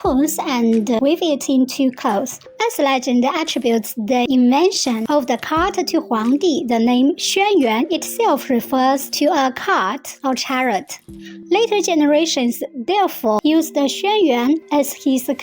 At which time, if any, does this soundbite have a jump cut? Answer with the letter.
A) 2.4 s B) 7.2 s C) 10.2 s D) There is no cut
A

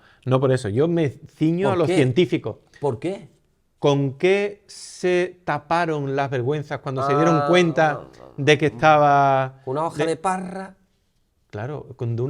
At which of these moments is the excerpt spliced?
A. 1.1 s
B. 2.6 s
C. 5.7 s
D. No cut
D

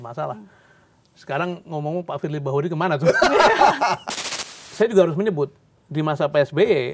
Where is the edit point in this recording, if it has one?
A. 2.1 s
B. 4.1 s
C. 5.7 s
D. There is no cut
B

